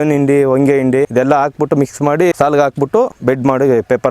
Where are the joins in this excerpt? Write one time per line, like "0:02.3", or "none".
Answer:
0:01.1
0:02.3
0:03.1